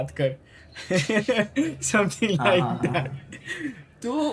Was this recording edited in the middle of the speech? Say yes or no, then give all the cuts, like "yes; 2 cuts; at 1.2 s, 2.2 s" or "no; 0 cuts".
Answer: no; 0 cuts